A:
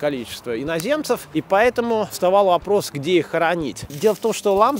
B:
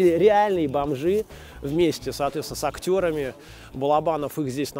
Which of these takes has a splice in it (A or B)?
A